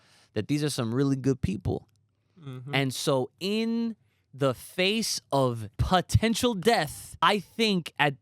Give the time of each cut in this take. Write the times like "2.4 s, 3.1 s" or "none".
5.7 s, 7.2 s